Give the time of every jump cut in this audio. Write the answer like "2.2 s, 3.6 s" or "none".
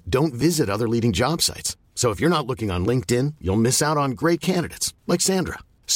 none